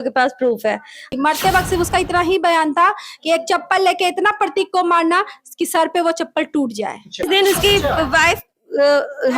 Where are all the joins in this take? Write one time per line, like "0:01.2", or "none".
0:01.1
0:07.3